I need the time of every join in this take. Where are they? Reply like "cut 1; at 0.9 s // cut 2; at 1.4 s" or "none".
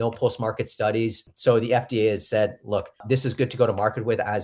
cut 1; at 1.3 s // cut 2; at 3.0 s